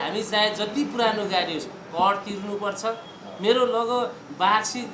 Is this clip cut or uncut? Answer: uncut